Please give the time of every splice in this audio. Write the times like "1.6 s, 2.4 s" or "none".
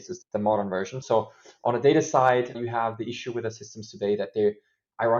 1.0 s